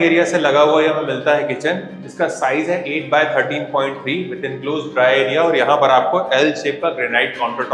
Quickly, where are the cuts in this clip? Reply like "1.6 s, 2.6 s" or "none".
none